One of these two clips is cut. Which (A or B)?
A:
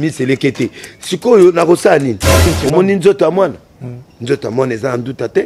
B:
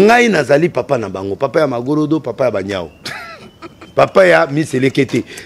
A